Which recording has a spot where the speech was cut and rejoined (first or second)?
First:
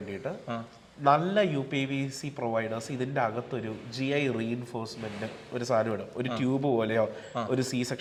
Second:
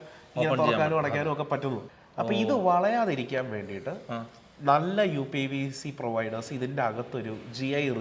second